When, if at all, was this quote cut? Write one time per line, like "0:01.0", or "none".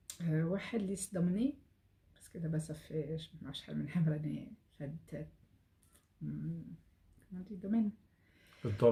none